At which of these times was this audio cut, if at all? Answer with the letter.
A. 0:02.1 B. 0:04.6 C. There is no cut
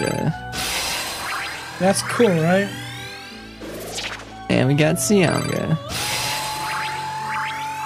C